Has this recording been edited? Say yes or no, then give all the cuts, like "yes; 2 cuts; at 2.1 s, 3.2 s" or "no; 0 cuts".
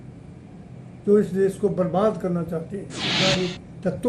yes; 1 cut; at 3.2 s